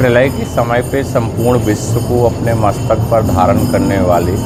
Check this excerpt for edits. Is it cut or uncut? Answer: uncut